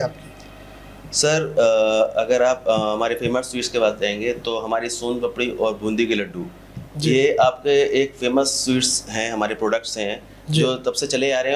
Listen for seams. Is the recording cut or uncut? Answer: uncut